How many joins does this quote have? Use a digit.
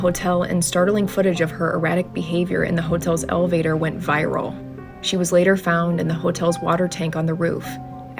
0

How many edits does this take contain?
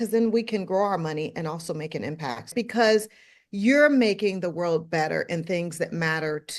1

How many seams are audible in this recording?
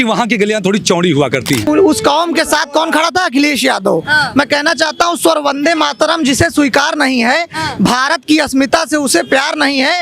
1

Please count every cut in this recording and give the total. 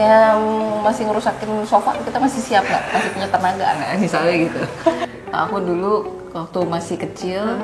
1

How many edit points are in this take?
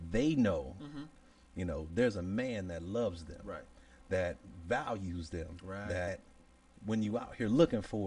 1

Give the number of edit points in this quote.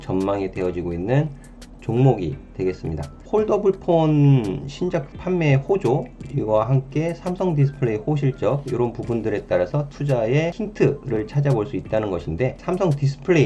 4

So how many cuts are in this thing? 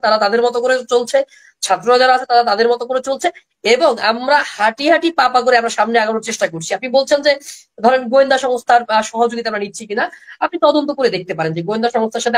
0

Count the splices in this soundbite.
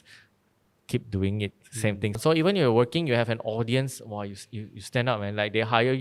1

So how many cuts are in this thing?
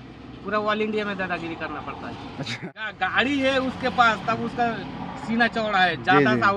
1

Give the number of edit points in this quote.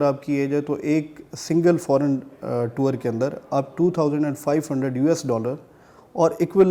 0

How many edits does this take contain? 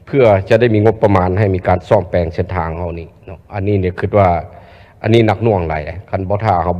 0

